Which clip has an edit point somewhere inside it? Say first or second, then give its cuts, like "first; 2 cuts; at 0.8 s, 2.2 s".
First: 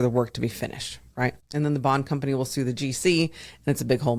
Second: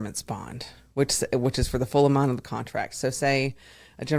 first; 1 cut; at 1.4 s